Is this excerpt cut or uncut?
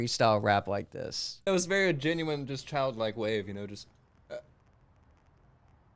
cut